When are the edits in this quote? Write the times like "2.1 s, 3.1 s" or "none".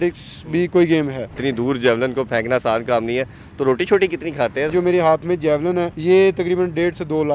1.4 s, 4.7 s, 5.9 s